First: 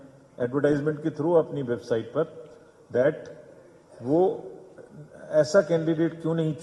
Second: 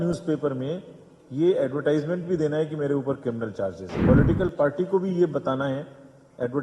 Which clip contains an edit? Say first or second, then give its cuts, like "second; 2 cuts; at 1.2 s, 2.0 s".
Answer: second; 1 cut; at 3.9 s